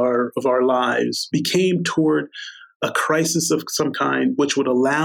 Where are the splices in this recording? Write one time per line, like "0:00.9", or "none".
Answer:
0:01.2